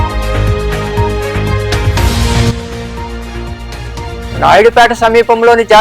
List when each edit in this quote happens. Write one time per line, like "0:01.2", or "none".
0:01.8